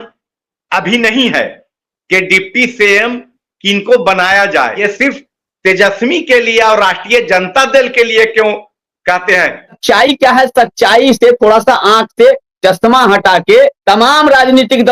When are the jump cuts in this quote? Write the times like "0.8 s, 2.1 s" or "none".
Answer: 4.8 s, 9.8 s, 13.8 s